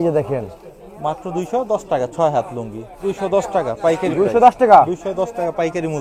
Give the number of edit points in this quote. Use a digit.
1